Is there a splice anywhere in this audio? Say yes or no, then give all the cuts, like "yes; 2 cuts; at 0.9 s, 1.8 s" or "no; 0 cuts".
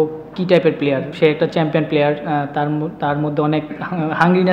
yes; 1 cut; at 1.1 s